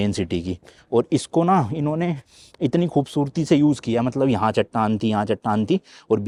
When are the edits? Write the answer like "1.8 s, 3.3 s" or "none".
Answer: none

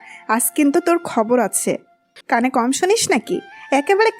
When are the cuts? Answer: 2.1 s

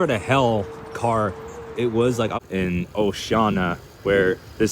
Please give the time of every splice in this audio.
2.3 s

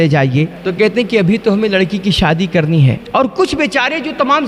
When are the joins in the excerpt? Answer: 3.0 s

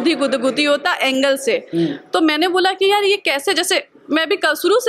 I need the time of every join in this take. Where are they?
none

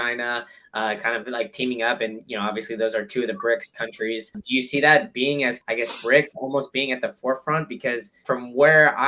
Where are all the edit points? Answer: 4.4 s, 5.6 s, 8.2 s

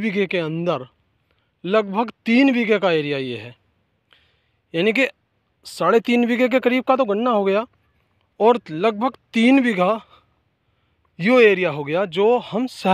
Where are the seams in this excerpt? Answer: none

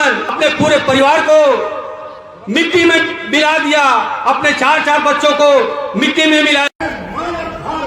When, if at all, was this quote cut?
6.7 s

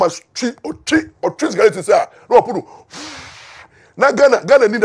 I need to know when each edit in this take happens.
none

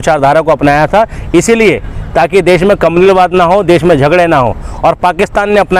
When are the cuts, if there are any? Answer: none

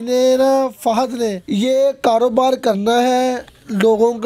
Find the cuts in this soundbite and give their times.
1.4 s

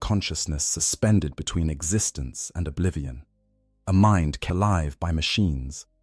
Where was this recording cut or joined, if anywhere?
4.4 s

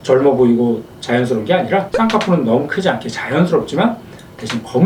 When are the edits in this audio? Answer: none

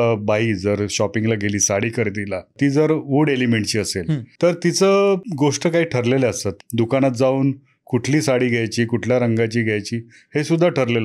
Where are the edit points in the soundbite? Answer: 2.5 s, 4.2 s, 5.3 s, 6.5 s

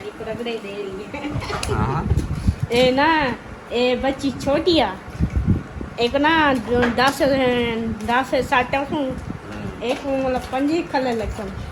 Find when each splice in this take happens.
none

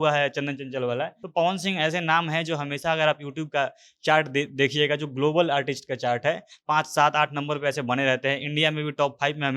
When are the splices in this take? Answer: 1.2 s

